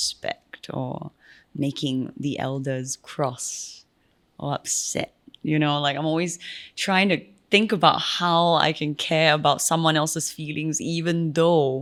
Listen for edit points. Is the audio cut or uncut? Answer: uncut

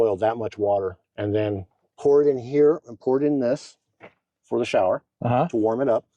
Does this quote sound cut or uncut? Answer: cut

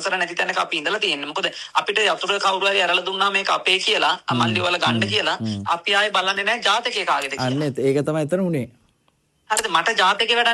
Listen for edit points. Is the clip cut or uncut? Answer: uncut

